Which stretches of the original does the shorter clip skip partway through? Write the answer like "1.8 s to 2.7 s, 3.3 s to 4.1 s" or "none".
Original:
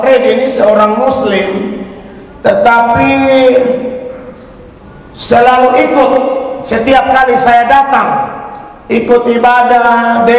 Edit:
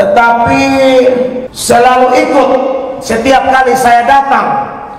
4.0 s to 5.1 s